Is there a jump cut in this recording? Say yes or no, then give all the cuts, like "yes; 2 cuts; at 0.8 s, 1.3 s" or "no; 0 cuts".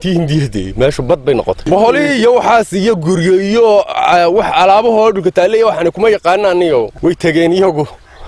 no; 0 cuts